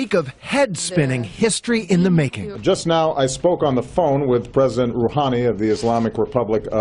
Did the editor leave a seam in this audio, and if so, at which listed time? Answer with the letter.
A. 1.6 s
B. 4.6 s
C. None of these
A